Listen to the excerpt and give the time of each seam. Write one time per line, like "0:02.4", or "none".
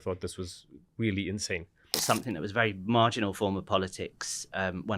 0:02.0